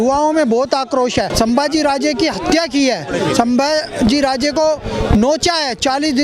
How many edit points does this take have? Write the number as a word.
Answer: one